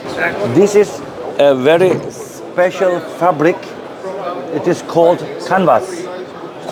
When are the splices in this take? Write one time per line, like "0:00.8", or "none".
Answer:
none